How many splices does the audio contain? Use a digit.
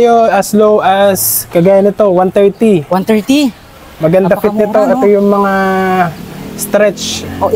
0